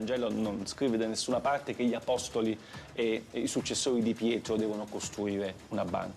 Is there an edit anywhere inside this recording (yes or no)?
no